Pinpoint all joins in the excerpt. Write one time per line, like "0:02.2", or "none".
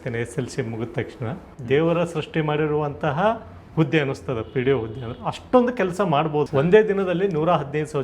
0:01.5
0:06.5